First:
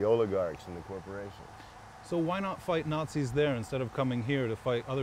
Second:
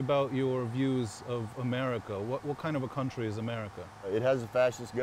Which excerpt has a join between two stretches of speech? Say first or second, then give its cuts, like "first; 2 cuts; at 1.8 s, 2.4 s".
second; 1 cut; at 4.1 s